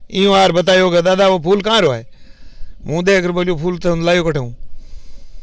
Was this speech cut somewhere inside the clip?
no; 0 cuts

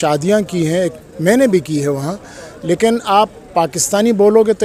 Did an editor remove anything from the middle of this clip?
no; 0 cuts

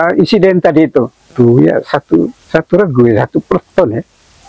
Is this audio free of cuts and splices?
no; 1 cut; at 2.4 s

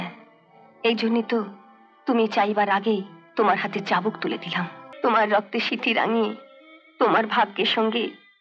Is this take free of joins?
no; 1 cut; at 4.8 s

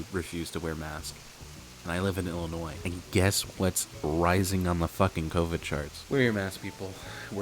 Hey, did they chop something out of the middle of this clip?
yes; 2 cuts; at 2.8 s, 5.9 s

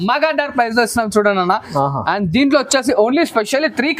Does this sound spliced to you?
no; 0 cuts

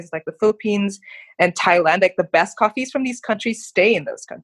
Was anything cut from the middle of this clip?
no; 0 cuts

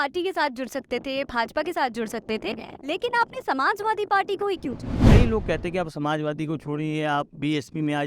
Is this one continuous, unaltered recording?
no; 1 cut; at 5.0 s

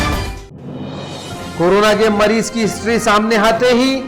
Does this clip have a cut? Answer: yes; 1 cut; at 1.1 s

